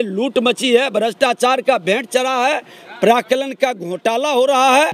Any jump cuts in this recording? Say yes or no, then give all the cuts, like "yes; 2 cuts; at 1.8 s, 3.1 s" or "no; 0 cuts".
no; 0 cuts